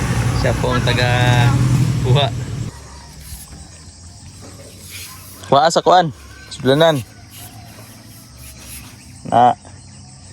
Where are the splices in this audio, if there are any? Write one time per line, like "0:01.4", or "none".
0:02.7